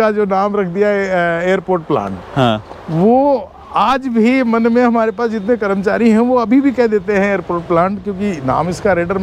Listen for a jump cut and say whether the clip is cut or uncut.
uncut